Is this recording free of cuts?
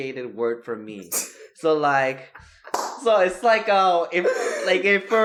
yes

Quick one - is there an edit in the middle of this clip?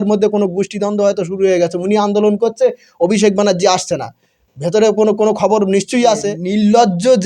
yes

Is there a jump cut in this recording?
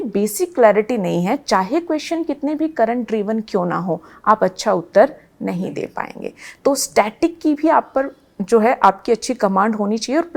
no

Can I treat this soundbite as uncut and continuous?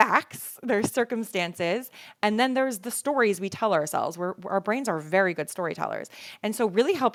yes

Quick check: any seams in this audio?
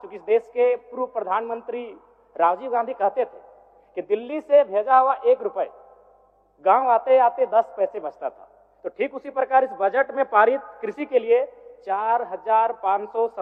no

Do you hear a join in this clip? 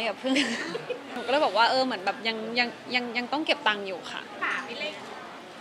yes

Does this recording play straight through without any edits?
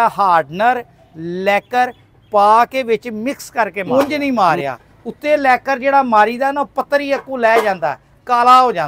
no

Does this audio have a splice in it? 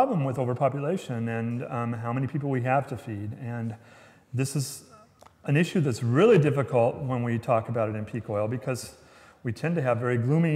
no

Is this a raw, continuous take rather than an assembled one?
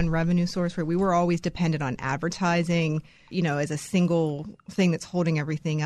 no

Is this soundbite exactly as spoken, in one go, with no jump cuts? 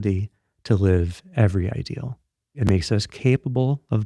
no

